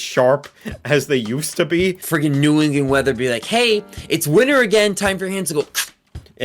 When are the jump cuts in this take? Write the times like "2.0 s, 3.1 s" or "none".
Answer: 2.0 s